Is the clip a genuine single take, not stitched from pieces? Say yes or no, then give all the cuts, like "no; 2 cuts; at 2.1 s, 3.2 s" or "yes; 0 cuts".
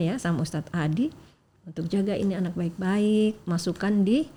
yes; 0 cuts